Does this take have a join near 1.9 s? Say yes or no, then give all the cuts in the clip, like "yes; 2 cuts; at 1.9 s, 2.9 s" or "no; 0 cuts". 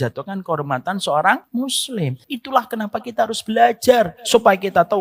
yes; 2 cuts; at 1.9 s, 4.2 s